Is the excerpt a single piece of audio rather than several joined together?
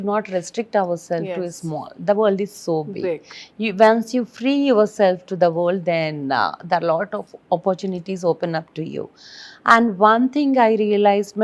yes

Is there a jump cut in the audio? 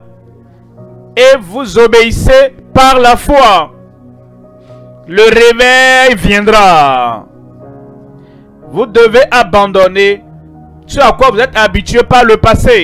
yes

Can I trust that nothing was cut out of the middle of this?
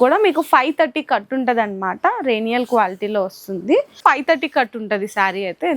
no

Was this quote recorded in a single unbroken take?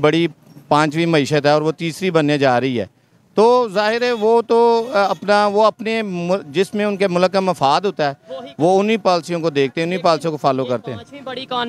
yes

